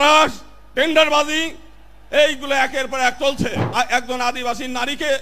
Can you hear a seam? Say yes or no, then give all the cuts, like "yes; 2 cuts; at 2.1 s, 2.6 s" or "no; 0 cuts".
yes; 1 cut; at 3.6 s